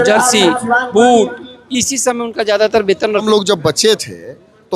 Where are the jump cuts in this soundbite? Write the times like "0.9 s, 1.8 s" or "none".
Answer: 3.2 s